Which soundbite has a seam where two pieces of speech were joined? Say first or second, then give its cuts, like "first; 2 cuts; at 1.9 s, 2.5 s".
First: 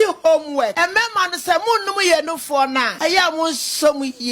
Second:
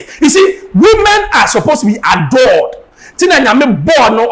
first; 2 cuts; at 0.7 s, 2.9 s